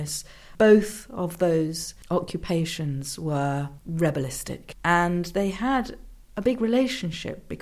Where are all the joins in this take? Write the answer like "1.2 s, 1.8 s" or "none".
1.9 s, 3.8 s, 4.7 s